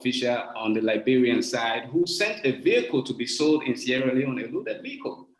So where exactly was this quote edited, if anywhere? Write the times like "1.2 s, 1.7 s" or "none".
none

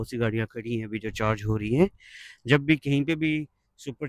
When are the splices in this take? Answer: none

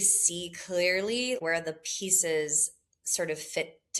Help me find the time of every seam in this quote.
none

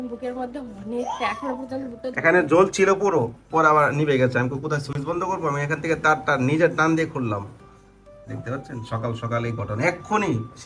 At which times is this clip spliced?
none

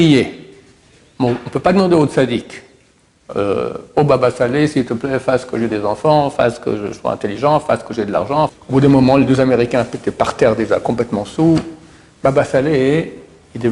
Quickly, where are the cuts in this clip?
8.5 s

